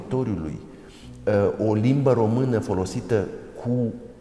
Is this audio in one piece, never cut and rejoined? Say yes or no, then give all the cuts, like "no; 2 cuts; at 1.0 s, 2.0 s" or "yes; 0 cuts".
yes; 0 cuts